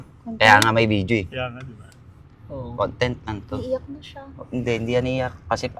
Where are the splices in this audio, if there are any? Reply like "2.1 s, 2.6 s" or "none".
none